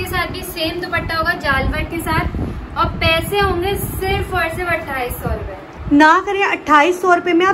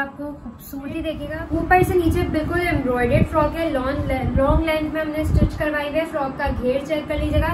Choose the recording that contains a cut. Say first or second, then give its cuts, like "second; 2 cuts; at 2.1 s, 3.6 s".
second; 1 cut; at 1.3 s